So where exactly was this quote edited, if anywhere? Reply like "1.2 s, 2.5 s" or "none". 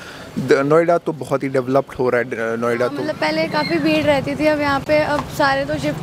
3.1 s